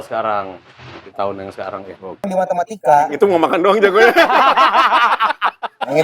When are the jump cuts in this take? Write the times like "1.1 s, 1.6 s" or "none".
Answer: 2.3 s